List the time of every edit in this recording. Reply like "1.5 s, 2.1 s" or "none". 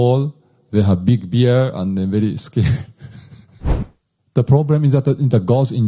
3.8 s